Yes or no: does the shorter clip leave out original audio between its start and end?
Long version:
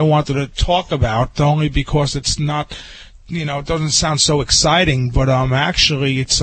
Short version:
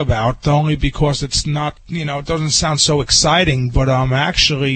yes